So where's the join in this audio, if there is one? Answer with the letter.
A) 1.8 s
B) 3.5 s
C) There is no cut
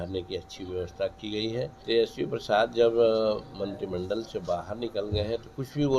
A